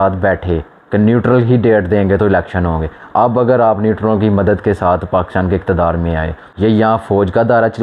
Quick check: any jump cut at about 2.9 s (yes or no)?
no